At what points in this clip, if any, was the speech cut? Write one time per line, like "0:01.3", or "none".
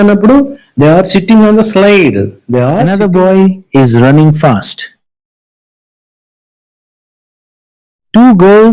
0:02.8